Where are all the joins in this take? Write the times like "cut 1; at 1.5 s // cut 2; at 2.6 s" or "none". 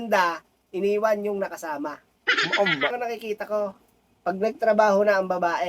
cut 1; at 2.9 s